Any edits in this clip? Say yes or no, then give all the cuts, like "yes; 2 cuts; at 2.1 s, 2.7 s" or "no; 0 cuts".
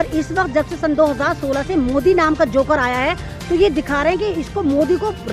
no; 0 cuts